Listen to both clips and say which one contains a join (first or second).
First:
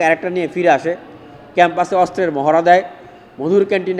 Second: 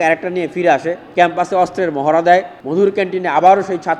second